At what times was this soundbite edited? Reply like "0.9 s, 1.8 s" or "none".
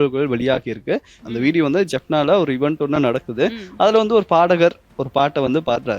1.1 s